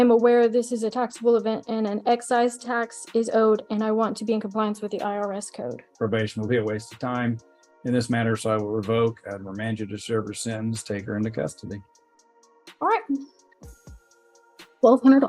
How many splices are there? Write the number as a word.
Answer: one